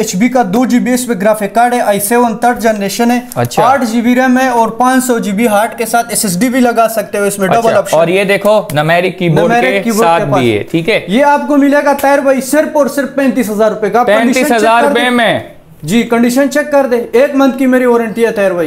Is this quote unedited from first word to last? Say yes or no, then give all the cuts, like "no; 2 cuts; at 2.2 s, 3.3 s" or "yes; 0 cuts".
yes; 0 cuts